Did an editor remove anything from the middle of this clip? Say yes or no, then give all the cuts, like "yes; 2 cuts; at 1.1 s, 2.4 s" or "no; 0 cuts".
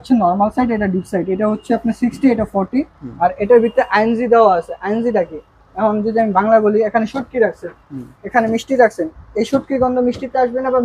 no; 0 cuts